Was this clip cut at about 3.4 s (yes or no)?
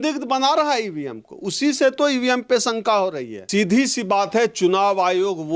yes